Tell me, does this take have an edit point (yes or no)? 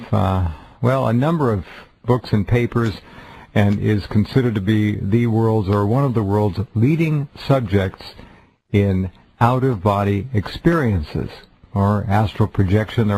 yes